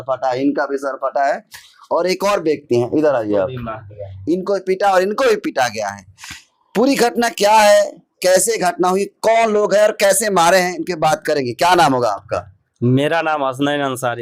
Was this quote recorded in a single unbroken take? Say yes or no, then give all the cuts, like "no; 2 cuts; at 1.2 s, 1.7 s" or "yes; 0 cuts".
yes; 0 cuts